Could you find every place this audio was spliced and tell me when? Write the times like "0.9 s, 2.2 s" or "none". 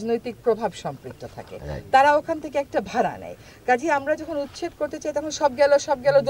none